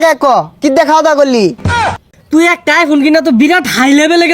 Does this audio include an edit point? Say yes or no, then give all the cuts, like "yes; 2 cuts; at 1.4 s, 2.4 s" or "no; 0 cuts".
yes; 1 cut; at 1.7 s